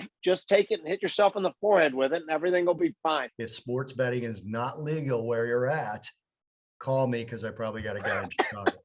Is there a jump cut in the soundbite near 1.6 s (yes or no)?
no